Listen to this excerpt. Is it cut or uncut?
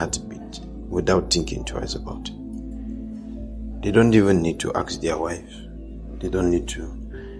uncut